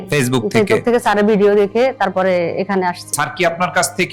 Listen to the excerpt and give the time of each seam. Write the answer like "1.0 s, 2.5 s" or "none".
3.2 s